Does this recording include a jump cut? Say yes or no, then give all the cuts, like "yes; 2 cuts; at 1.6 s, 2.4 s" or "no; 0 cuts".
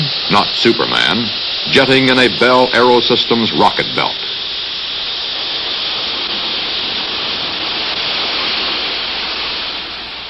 no; 0 cuts